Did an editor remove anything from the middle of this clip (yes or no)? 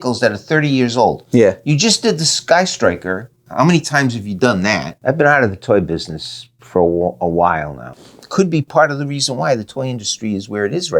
yes